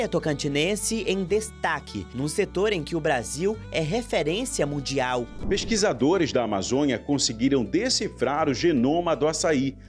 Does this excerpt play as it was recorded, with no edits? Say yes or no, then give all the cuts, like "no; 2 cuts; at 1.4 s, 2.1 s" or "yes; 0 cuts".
no; 1 cut; at 5.3 s